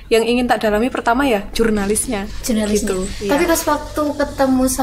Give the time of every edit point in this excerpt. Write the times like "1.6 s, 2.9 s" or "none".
none